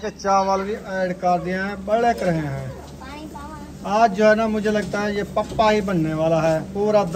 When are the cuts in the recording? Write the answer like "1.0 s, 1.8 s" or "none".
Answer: none

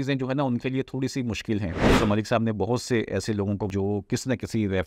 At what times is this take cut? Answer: 1.8 s, 3.7 s

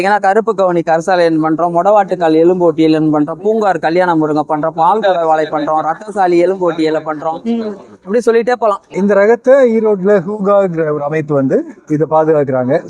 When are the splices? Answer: 9.0 s

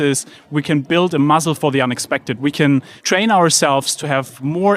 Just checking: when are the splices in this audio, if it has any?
2.9 s

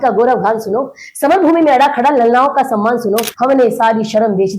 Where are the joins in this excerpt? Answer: 3.3 s

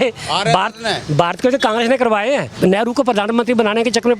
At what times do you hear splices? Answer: 2.5 s

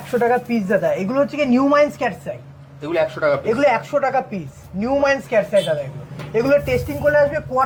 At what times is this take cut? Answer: none

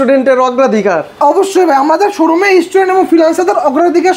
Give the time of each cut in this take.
none

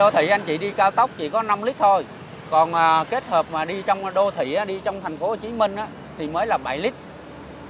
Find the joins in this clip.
none

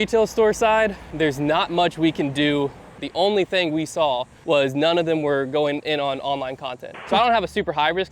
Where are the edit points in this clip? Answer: 1.0 s, 3.0 s, 4.3 s, 7.0 s

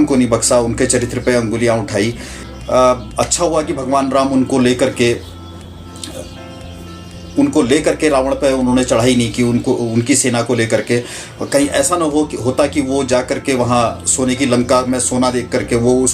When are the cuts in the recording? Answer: 2.4 s

